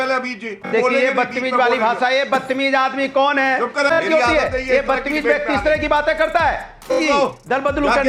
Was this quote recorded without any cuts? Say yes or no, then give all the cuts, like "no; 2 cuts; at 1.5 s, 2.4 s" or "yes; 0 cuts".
no; 3 cuts; at 0.7 s, 3.9 s, 6.9 s